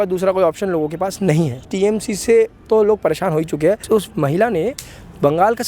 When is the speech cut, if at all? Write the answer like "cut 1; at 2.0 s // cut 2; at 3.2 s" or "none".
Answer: cut 1; at 1.7 s // cut 2; at 3.8 s